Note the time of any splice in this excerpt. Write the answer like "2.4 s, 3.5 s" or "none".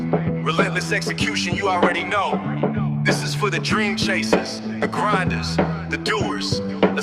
none